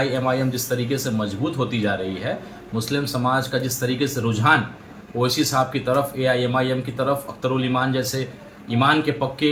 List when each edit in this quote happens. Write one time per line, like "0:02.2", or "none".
none